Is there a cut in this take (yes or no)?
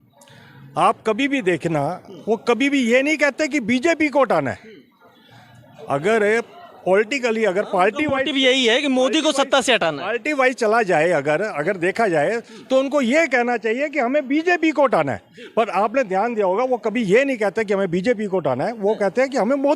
no